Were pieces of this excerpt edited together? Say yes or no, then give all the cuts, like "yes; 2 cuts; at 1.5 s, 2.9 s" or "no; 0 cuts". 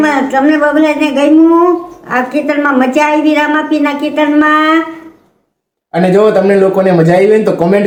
no; 0 cuts